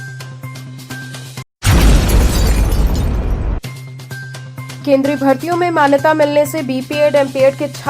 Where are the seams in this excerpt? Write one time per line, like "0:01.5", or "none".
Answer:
none